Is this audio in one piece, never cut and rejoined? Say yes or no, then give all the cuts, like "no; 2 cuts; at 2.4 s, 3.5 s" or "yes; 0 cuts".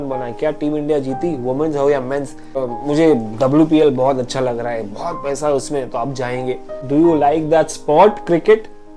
no; 2 cuts; at 2.7 s, 6.7 s